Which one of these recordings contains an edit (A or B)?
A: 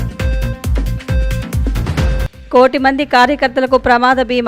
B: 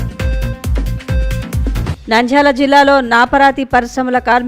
B